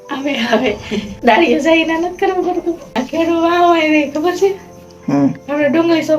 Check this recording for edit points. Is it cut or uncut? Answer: cut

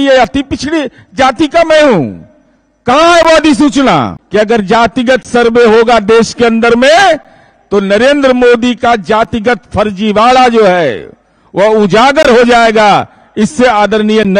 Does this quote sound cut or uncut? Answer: cut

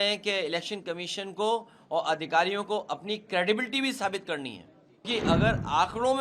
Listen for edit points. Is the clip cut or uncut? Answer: cut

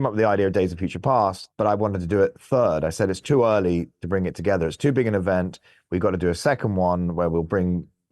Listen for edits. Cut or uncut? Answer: cut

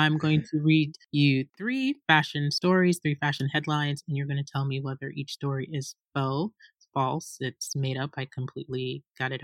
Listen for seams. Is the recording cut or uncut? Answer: uncut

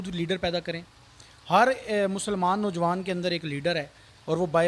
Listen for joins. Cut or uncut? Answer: uncut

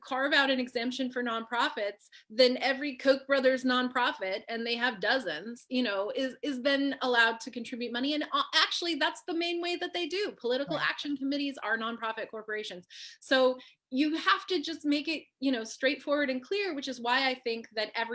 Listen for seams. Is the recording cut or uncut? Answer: uncut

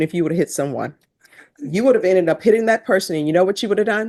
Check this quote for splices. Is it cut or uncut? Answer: uncut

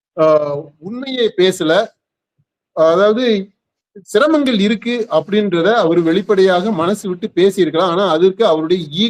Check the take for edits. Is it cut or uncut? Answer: uncut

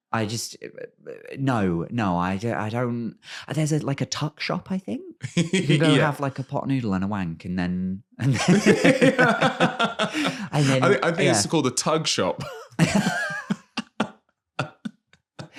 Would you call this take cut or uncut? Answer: uncut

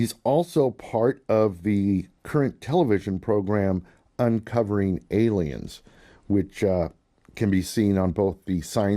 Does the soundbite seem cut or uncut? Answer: cut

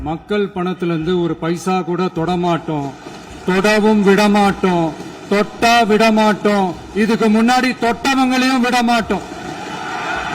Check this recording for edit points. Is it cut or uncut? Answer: uncut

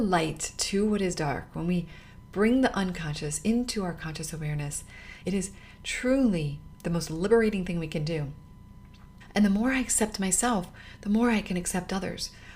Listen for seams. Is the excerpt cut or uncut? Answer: cut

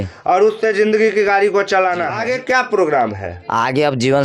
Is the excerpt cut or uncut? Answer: cut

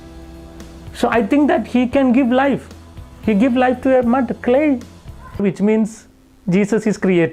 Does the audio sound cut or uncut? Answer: cut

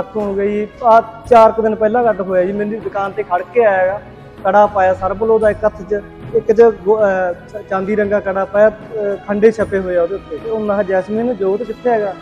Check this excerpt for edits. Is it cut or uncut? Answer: cut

